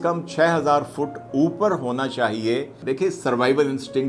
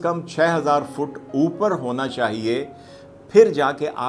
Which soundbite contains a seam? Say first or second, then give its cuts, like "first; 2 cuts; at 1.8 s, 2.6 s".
first; 1 cut; at 2.7 s